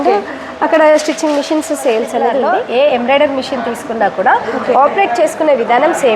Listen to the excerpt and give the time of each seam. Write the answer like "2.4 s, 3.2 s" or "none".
2.4 s